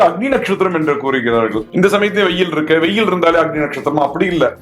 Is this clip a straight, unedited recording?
no; 1 cut; at 1.6 s

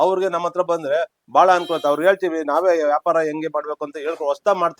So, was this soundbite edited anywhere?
no; 0 cuts

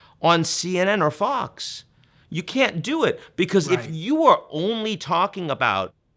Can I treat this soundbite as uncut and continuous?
no; 1 cut; at 3.6 s

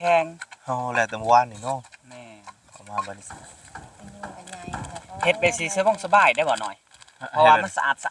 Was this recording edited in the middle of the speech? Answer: yes; 1 cut; at 3.3 s

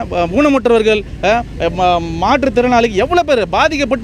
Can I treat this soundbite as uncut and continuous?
yes; 0 cuts

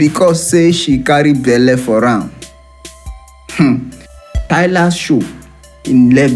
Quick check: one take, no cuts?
no; 1 cut; at 4.4 s

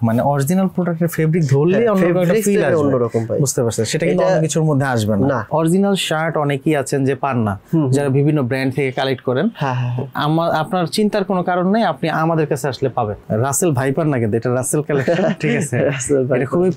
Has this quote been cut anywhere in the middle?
yes; 2 cuts; at 5.5 s, 13.2 s

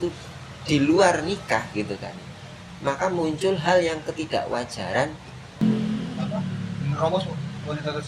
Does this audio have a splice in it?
yes; 1 cut; at 5.6 s

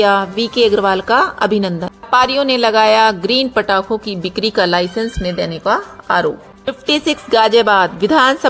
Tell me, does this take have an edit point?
yes; 2 cuts; at 1.9 s, 6.5 s

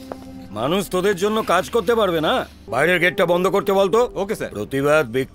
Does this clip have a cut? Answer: yes; 1 cut; at 2.6 s

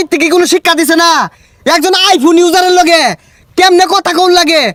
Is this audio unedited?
yes; 0 cuts

